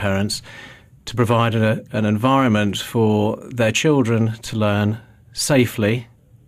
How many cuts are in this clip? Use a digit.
1